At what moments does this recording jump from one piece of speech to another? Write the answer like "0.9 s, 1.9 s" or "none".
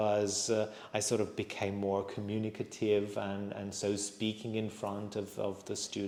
none